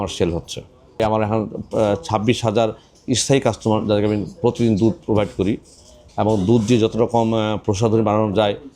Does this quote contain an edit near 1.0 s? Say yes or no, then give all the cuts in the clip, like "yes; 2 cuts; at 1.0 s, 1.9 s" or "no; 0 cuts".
yes; 1 cut; at 1.0 s